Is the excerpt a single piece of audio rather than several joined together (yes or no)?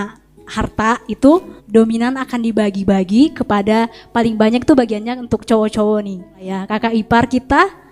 no